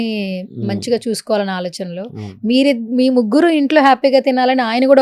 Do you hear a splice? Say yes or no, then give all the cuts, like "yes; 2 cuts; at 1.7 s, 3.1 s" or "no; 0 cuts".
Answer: no; 0 cuts